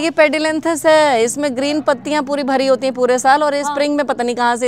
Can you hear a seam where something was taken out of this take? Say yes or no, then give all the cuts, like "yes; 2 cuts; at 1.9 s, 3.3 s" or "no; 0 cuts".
no; 0 cuts